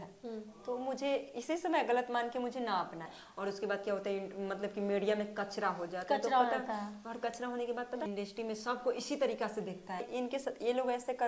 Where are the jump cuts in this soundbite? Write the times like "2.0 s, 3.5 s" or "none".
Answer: 3.2 s, 8.1 s, 10.1 s